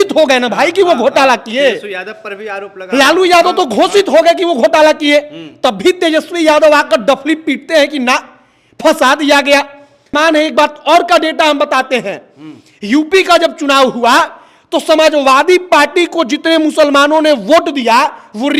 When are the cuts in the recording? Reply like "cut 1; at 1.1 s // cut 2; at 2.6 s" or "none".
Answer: cut 1; at 10.1 s